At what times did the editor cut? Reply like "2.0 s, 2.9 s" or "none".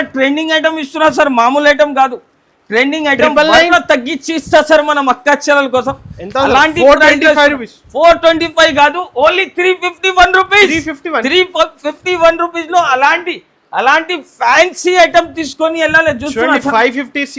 3.7 s